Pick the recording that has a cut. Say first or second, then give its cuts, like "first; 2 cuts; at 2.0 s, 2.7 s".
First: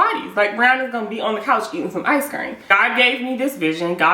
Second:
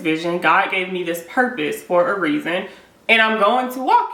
first; 1 cut; at 2.6 s